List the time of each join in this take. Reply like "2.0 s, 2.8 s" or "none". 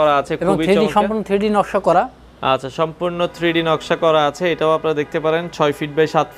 none